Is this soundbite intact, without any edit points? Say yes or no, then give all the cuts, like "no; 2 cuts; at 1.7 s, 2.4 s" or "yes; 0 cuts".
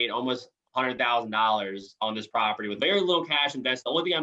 no; 1 cut; at 2.7 s